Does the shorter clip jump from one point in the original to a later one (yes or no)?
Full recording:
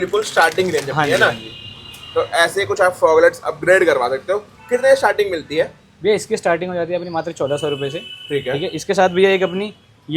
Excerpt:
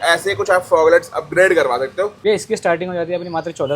yes